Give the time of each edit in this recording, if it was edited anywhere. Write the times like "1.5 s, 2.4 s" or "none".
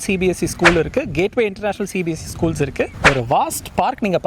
2.9 s